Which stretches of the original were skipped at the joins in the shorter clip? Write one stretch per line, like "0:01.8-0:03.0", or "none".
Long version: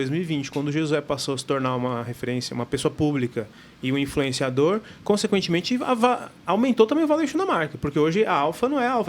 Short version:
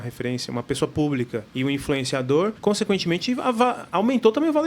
0:03.5-0:03.7
0:04.8-0:05.0
0:06.3-0:06.4